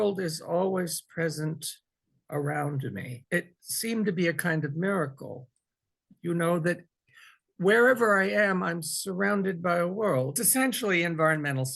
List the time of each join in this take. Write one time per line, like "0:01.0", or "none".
0:03.2
0:10.4